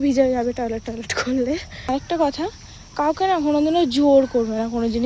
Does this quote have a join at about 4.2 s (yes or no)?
no